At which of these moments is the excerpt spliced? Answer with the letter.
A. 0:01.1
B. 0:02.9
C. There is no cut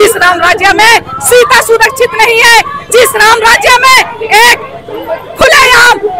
C